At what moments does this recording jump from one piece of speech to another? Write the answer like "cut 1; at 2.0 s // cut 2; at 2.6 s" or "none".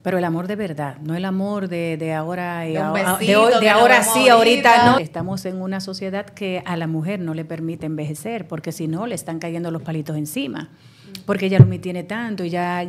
cut 1; at 5.0 s